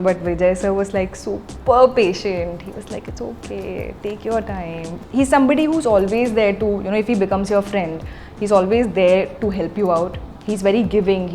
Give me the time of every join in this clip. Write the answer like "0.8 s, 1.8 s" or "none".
4.9 s, 10.3 s